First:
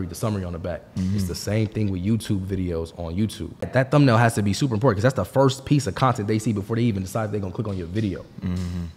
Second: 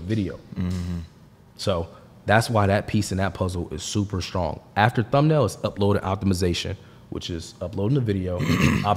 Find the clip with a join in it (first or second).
first